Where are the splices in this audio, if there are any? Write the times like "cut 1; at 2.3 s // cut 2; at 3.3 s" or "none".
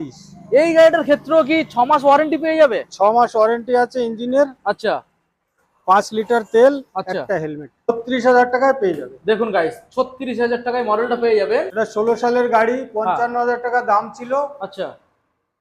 cut 1; at 7.9 s // cut 2; at 11.7 s